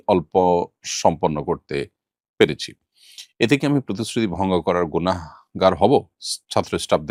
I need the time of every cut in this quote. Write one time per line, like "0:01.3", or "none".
none

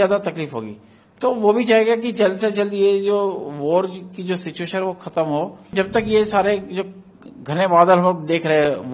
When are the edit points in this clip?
0:05.7

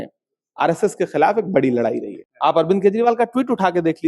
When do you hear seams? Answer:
0:02.2

